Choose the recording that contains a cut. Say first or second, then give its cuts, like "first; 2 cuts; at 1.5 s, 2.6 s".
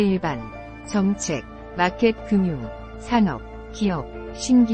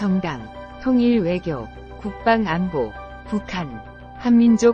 first; 1 cut; at 0.9 s